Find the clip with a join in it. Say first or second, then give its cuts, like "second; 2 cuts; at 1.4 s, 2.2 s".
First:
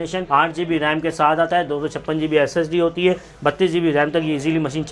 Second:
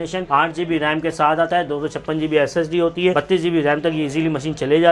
second; 1 cut; at 3.1 s